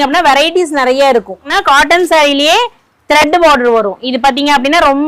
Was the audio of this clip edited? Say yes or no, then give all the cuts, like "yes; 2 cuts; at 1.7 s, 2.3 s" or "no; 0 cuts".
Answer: yes; 1 cut; at 1.5 s